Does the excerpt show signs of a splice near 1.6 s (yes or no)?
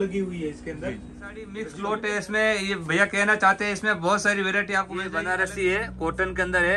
yes